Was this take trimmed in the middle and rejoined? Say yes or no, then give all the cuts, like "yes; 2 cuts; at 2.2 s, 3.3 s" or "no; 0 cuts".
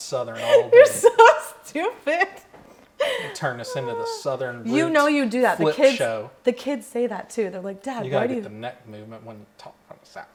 no; 0 cuts